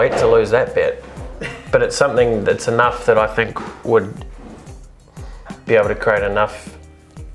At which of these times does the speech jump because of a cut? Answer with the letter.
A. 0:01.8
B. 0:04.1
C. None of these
C